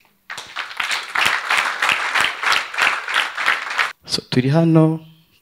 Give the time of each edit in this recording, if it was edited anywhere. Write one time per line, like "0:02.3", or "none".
0:04.0